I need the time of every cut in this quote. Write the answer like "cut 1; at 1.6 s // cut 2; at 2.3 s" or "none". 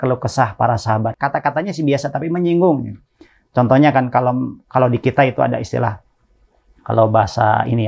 cut 1; at 1.2 s